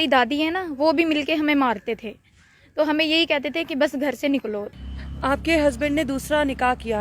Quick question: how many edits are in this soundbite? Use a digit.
1